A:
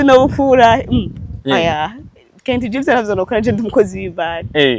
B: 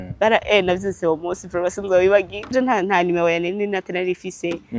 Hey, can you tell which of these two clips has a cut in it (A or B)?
B